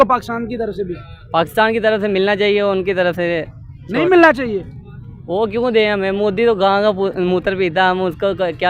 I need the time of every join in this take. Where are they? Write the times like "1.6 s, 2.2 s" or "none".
none